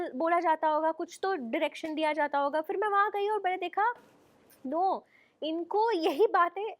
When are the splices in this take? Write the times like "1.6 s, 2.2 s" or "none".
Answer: none